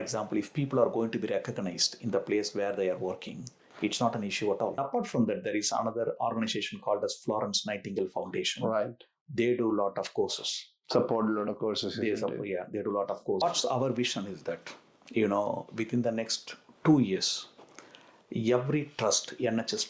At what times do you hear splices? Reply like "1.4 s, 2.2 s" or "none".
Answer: 4.8 s, 13.4 s

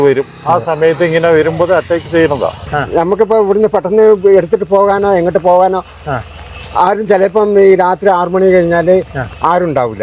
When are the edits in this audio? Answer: 2.6 s

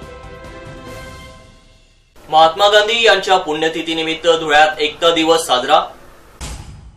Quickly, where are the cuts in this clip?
1.9 s

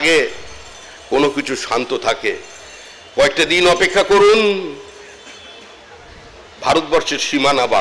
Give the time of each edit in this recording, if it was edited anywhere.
none

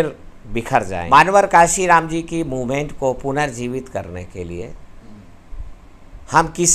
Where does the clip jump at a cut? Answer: 1.0 s

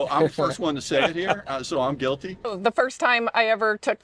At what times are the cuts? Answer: 2.4 s

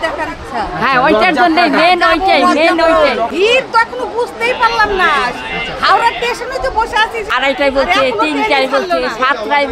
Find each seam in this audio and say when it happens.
3.3 s, 7.3 s

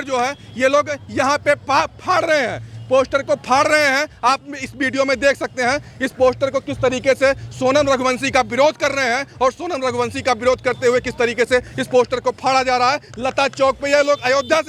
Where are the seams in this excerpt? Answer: none

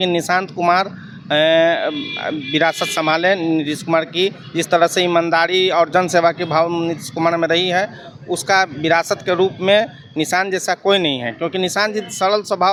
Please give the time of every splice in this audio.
none

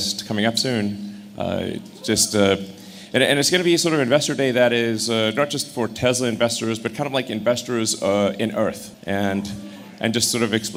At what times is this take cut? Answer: none

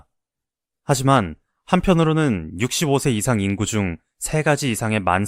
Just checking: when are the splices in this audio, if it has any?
0.9 s

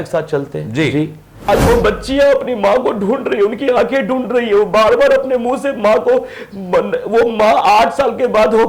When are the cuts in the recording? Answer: 1.5 s

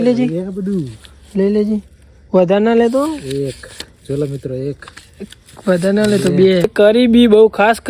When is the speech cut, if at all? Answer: 6.7 s

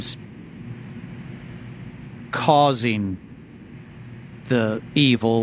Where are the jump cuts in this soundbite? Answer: none

